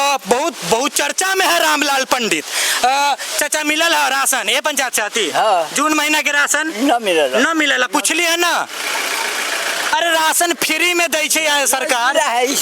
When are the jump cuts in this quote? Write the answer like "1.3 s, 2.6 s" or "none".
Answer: none